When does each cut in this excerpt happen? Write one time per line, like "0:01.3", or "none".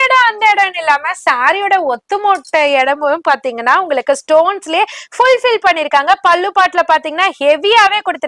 none